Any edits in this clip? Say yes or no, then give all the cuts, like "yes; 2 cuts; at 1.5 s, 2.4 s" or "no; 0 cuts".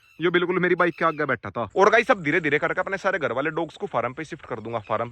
yes; 1 cut; at 1.7 s